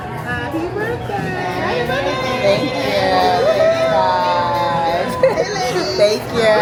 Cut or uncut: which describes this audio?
uncut